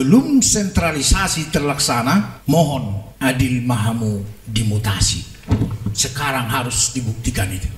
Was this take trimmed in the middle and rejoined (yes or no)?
yes